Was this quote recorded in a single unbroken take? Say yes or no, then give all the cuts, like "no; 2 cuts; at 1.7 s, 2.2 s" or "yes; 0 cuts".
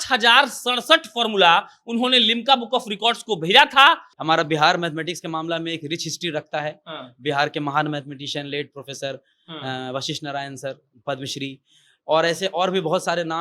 no; 1 cut; at 4.1 s